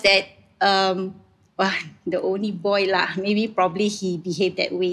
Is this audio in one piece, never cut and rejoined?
yes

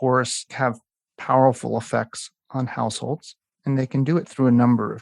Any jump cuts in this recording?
no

